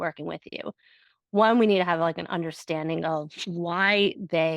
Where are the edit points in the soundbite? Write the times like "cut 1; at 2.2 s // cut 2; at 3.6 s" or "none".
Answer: none

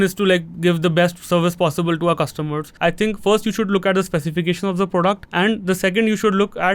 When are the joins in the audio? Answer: cut 1; at 2.6 s // cut 2; at 5.2 s

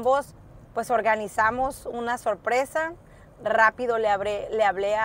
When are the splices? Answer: none

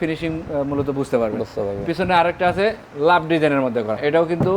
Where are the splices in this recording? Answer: none

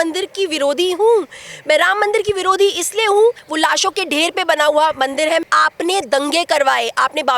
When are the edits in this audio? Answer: cut 1; at 3.5 s // cut 2; at 5.4 s

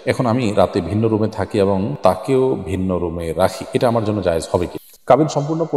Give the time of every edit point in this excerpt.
cut 1; at 4.8 s

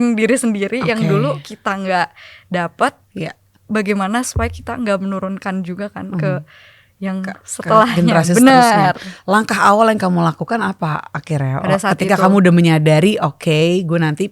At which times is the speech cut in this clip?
none

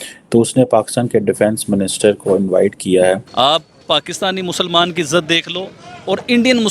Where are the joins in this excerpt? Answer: cut 1; at 3.3 s

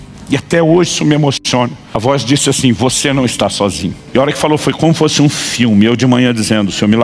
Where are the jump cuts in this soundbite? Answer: none

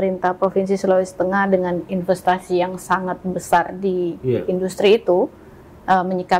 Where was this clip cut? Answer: none

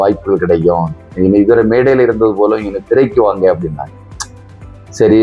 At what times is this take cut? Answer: none

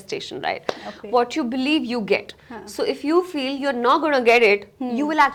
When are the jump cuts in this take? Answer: none

